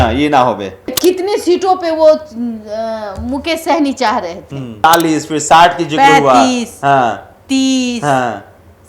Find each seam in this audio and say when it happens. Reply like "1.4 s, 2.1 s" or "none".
0.9 s, 4.8 s